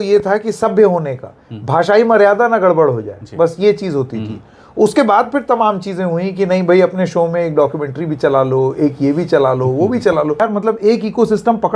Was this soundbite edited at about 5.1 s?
no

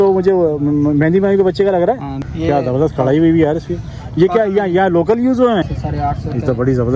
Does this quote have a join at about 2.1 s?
yes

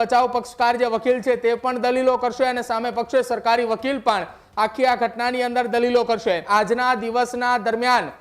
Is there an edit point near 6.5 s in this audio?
yes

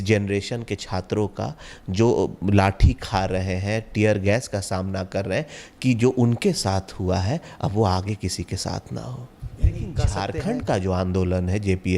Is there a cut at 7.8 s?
no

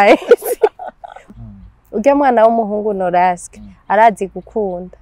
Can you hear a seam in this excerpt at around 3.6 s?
no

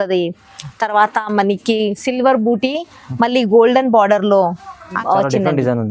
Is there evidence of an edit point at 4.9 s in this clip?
yes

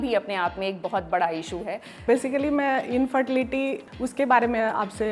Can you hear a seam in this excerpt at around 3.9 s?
yes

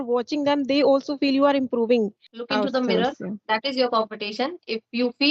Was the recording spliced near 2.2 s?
yes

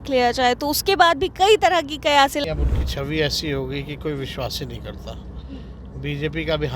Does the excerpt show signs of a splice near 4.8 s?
no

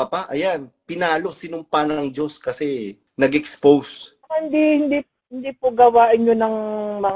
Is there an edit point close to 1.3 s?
no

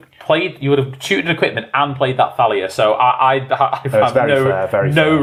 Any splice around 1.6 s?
no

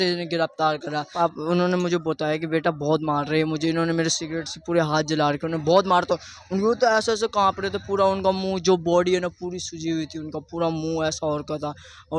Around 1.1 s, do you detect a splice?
yes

